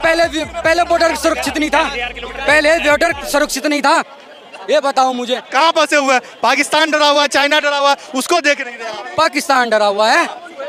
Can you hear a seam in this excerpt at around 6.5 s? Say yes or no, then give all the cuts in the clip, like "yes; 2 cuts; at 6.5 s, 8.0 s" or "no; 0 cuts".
no; 0 cuts